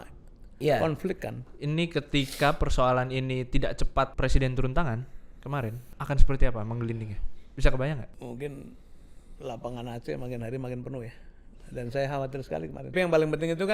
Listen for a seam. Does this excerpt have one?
yes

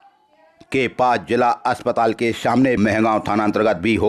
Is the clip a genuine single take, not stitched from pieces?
no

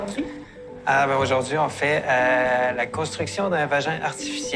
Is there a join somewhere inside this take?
no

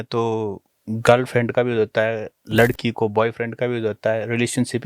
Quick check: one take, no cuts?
yes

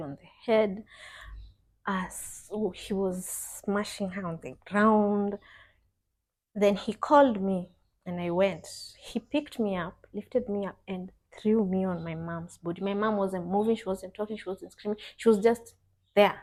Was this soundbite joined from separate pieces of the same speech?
no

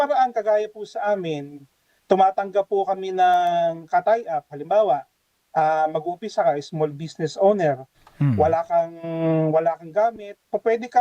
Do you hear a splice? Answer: no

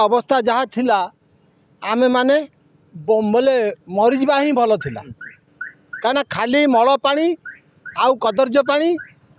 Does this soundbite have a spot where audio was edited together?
no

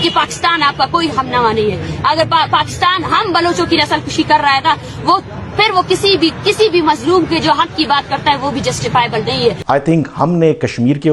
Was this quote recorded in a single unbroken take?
no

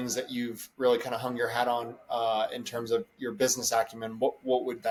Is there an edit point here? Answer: no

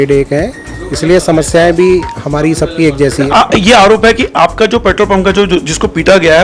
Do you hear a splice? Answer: yes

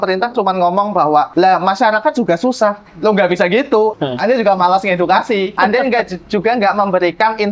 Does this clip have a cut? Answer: yes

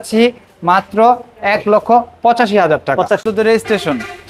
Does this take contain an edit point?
yes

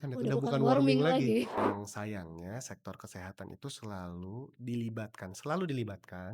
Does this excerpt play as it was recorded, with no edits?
no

